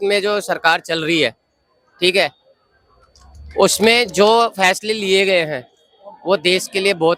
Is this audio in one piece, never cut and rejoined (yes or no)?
yes